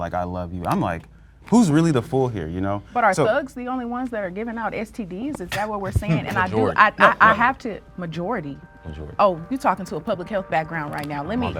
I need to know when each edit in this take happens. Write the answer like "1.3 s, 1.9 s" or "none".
none